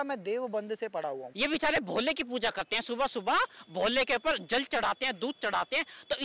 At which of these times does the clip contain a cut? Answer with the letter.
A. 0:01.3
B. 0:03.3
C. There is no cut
A